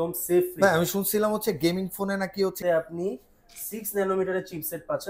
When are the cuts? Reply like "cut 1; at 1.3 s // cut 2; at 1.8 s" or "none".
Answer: cut 1; at 2.6 s